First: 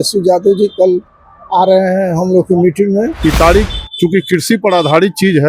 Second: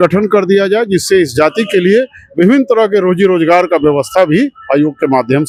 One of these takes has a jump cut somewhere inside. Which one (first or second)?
first